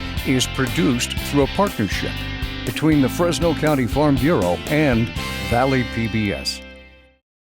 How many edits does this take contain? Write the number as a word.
one